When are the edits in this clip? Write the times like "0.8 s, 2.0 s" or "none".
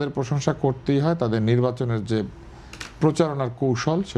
none